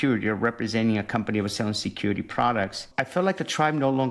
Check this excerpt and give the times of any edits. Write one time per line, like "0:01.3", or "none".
0:02.8